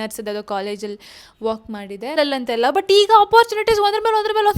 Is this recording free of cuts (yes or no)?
no